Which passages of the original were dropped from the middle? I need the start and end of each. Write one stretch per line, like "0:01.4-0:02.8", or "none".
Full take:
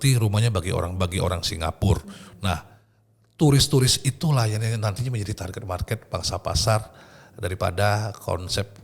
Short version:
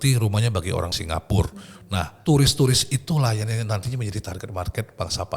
0:00.9-0:01.4
0:02.7-0:03.3